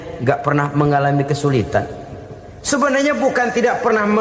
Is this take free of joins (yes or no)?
yes